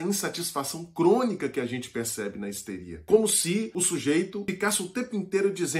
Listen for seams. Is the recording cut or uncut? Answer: cut